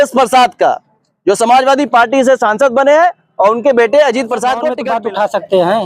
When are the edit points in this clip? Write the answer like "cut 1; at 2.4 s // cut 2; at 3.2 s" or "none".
cut 1; at 4.8 s

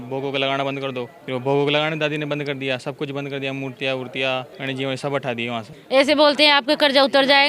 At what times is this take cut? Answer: cut 1; at 1.2 s // cut 2; at 4.5 s // cut 3; at 5.8 s

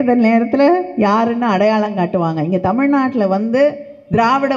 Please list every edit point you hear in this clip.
none

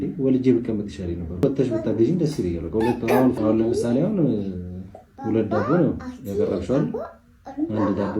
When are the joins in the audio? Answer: cut 1; at 1.4 s // cut 2; at 3.3 s

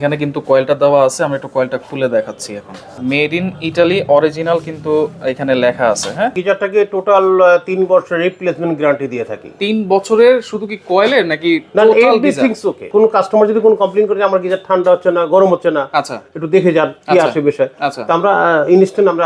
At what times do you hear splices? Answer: cut 1; at 2.9 s // cut 2; at 6.4 s // cut 3; at 12.8 s

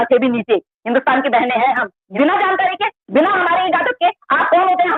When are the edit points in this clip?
cut 1; at 2.0 s

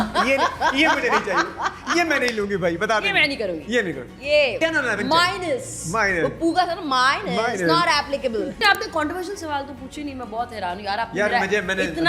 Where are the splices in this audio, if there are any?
cut 1; at 8.6 s

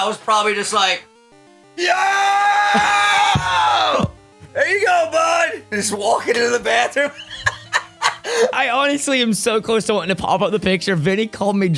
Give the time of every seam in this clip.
cut 1; at 8.6 s

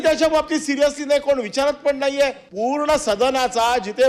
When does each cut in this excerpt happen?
cut 1; at 2.4 s

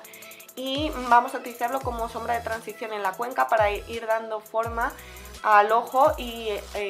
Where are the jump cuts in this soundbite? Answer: cut 1; at 1.0 s

